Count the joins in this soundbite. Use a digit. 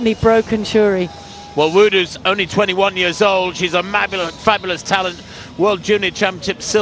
0